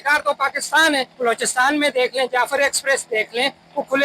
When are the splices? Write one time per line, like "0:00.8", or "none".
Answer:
0:01.1